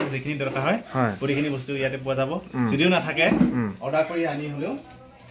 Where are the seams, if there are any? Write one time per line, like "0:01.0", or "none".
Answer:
none